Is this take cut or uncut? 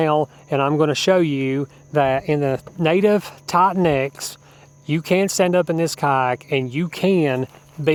uncut